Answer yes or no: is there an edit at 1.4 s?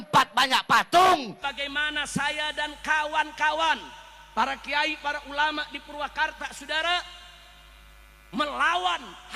yes